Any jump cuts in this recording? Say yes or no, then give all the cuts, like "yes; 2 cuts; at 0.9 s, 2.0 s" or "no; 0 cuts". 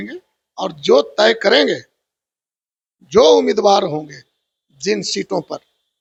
no; 0 cuts